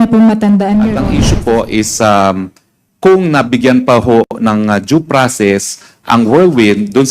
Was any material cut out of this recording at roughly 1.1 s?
yes; 1 cut; at 1.1 s

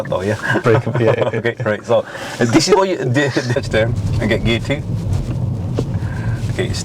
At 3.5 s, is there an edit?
yes; 1 cut; at 3.5 s

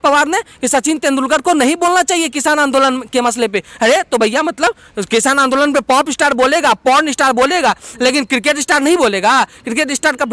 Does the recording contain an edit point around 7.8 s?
no; 0 cuts

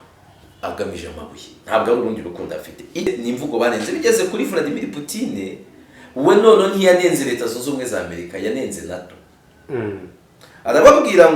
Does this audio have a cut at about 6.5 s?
no; 1 cut; at 3.1 s

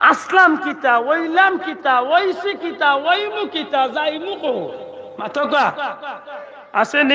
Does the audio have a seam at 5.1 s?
yes; 1 cut; at 5.1 s

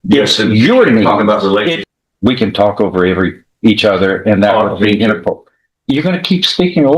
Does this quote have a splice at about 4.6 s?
no; 1 cut; at 1.8 s

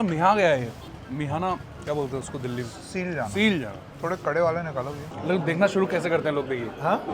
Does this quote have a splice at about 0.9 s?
yes; 4 cuts; at 0.9 s, 1.7 s, 3.8 s, 5.1 s

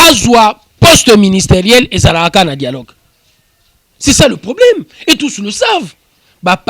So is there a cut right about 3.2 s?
no; 0 cuts

